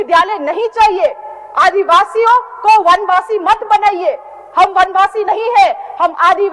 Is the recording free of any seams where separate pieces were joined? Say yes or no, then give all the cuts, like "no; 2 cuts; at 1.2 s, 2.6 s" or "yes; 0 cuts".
yes; 0 cuts